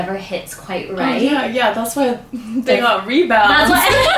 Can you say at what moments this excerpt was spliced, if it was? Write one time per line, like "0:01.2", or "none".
none